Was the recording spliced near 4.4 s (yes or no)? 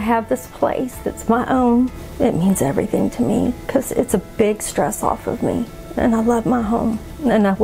no